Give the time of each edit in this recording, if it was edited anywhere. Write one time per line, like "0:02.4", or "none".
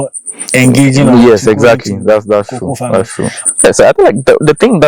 0:03.4